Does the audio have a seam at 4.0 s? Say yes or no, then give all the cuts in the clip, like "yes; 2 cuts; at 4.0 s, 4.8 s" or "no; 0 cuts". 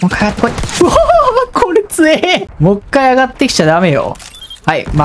no; 1 cut; at 2.5 s